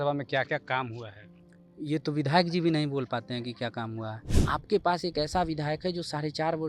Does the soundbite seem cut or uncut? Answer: cut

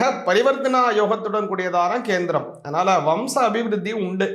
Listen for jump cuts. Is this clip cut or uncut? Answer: uncut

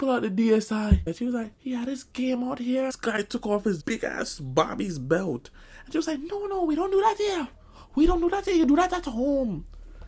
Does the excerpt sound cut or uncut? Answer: cut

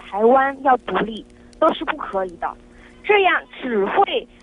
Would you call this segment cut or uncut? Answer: uncut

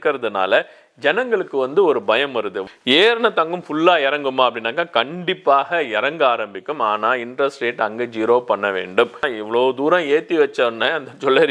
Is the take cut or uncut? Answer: cut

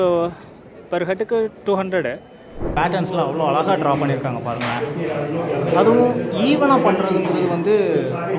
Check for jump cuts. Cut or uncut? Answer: cut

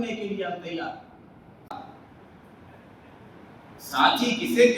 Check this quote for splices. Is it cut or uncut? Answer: cut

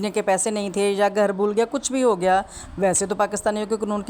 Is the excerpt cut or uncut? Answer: uncut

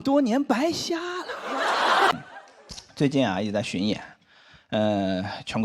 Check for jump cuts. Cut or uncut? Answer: cut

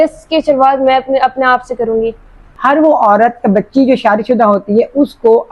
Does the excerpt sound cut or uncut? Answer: cut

